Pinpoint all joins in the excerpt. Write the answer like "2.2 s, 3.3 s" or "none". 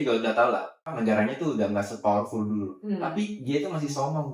0.9 s